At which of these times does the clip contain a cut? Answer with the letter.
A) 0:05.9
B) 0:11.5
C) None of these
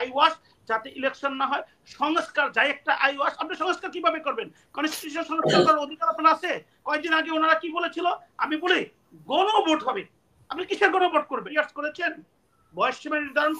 B